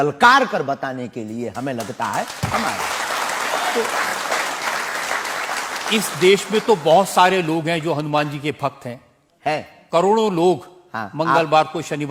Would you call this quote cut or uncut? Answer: uncut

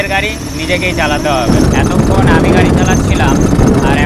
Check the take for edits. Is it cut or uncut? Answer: uncut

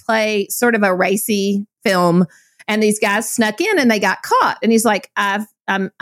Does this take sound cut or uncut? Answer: cut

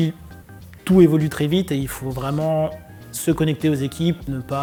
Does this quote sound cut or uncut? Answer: uncut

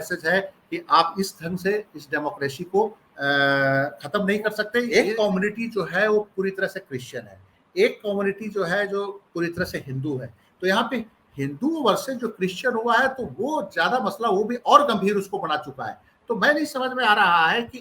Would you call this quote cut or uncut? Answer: cut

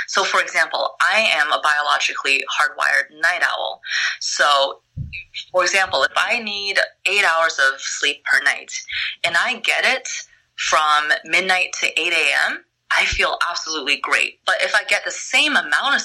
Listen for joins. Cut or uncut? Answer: cut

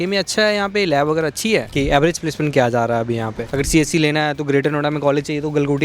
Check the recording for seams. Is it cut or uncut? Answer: cut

